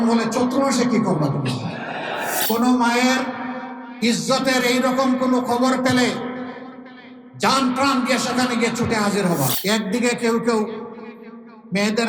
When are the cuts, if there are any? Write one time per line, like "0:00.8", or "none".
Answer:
0:02.4
0:09.6